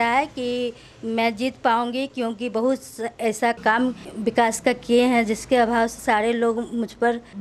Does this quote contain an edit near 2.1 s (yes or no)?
no